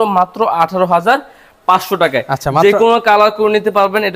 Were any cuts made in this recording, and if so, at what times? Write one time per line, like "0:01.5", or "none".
none